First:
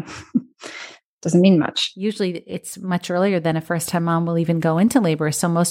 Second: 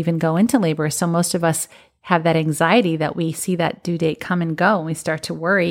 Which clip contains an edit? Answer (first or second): first